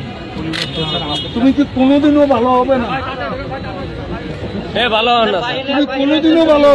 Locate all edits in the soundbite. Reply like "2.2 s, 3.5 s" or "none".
none